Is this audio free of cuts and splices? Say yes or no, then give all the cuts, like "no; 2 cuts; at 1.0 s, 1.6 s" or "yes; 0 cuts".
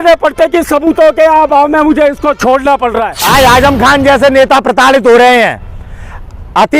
no; 1 cut; at 3.2 s